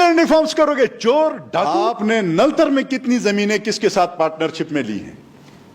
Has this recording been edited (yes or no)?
yes